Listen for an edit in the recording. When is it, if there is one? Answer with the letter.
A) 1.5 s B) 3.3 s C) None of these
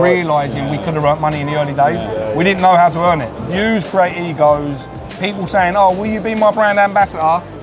B